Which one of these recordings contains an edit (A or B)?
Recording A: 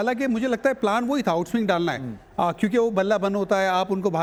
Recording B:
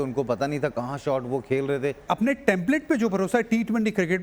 B